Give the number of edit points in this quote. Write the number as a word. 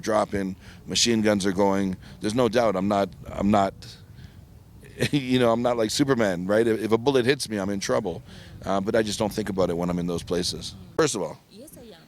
one